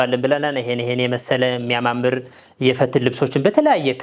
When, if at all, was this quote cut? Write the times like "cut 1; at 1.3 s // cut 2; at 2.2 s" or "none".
none